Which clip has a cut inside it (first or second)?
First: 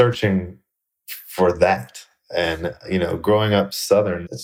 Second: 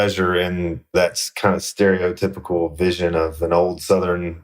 second